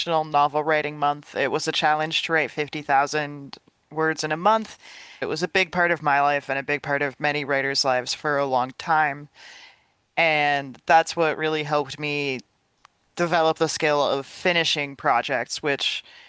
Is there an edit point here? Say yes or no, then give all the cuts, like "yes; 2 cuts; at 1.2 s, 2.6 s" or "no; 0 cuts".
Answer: no; 0 cuts